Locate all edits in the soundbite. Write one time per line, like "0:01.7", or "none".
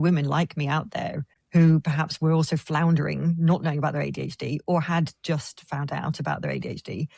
none